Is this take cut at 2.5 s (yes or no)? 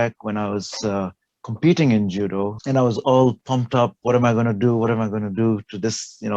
yes